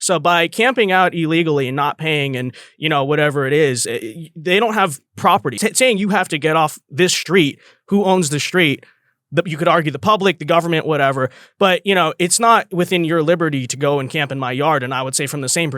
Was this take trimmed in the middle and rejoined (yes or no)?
yes